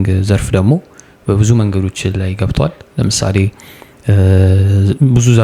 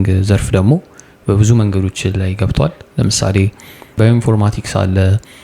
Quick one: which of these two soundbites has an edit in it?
second; 1 cut; at 4.0 s

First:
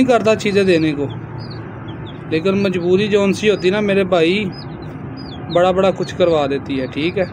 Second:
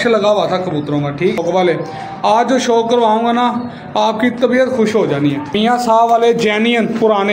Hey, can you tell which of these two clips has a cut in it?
second; 2 cuts; at 1.4 s, 5.6 s

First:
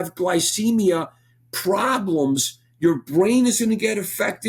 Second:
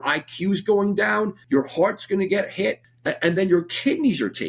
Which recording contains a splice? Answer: second; 2 cuts; at 1.4 s, 2.9 s

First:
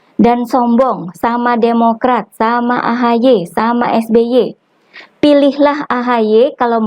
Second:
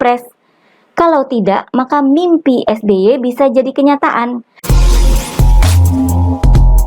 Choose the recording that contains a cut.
second; 1 cut; at 4.5 s

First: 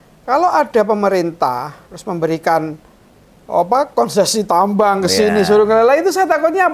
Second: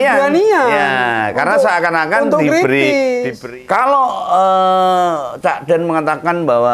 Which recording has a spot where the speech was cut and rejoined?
second; 1 cut; at 3.4 s

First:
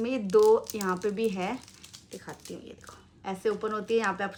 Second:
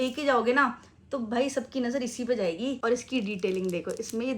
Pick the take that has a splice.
second; 1 cut; at 2.8 s

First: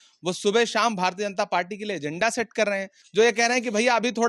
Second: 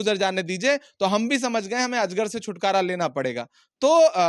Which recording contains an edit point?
first; 1 cut; at 3.0 s

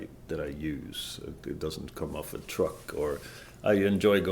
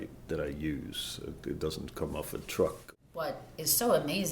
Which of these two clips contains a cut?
second; 1 cut; at 2.8 s

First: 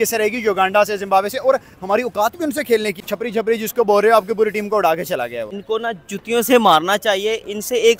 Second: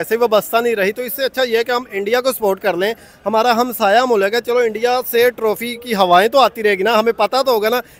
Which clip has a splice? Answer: first; 2 cuts; at 2.9 s, 5.4 s

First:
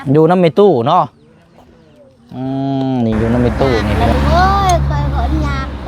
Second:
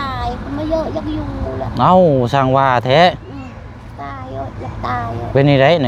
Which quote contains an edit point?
first; 1 cut; at 3.9 s

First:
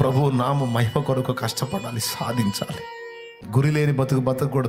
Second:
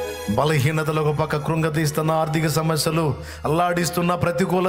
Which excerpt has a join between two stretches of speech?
first; 1 cut; at 3.4 s

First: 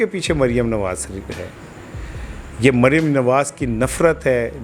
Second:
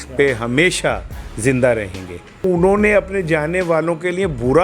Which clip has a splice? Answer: second; 1 cut; at 2.4 s

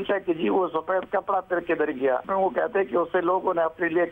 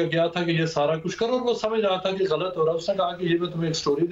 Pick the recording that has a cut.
first; 1 cut; at 2.2 s

